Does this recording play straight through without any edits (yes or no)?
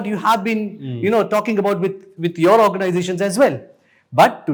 yes